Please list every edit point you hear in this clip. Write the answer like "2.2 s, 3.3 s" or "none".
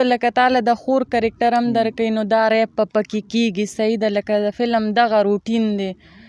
none